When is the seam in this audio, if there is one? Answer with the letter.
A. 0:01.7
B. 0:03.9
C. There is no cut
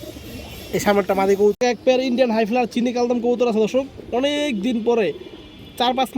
A